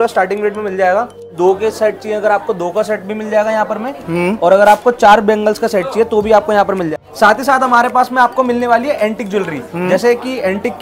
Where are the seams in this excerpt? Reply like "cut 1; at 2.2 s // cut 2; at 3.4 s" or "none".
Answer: cut 1; at 1.3 s // cut 2; at 6.9 s